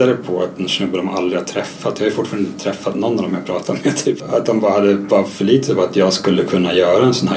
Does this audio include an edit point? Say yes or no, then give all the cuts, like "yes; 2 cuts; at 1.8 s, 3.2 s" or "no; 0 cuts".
yes; 1 cut; at 4.2 s